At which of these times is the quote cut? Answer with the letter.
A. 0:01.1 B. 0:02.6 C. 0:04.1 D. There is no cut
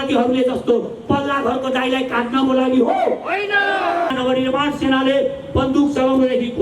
C